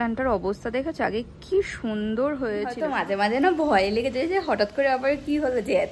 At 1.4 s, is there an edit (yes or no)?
no